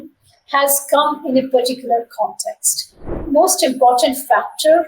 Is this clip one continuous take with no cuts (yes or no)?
no